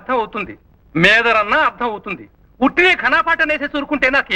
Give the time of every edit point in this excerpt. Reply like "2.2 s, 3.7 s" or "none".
none